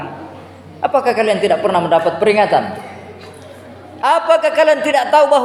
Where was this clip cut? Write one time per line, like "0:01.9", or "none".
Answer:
none